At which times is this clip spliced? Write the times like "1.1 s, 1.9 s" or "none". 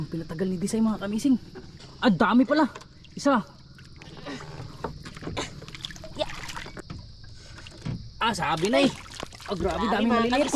1.8 s, 6.8 s

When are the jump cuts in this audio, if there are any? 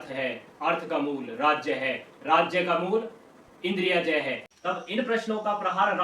4.5 s

